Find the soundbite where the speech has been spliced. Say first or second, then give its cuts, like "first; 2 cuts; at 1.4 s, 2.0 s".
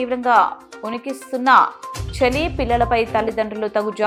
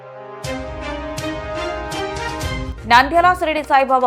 second; 1 cut; at 2.7 s